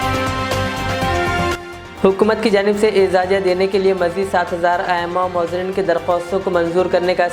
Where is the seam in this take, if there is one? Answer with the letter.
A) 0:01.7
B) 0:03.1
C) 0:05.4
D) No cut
A